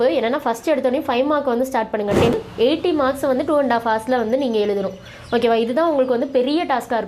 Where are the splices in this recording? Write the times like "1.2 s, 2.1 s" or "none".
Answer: 2.3 s